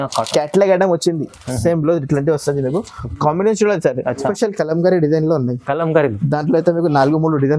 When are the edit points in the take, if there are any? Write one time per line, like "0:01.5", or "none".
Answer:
0:04.3